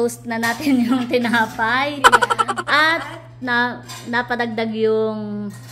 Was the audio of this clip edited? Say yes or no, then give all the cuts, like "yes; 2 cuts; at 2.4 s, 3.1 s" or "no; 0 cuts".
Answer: no; 0 cuts